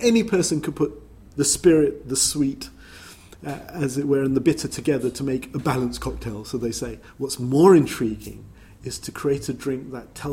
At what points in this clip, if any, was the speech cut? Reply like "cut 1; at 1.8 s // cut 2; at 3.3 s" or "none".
cut 1; at 1.2 s

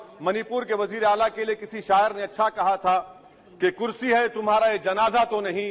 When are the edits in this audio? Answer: none

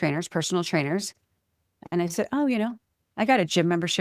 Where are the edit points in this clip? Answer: none

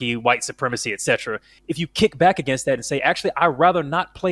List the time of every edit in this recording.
cut 1; at 1.5 s

